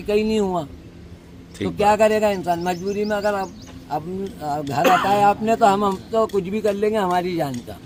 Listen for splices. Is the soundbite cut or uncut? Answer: uncut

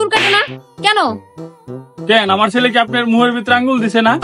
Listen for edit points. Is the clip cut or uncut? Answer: uncut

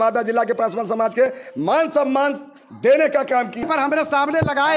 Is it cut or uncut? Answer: cut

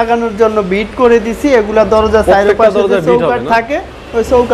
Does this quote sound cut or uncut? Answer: uncut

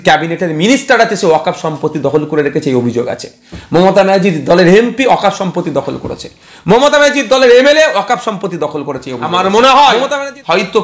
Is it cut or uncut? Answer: cut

